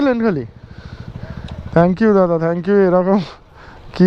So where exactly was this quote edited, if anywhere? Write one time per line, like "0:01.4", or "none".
none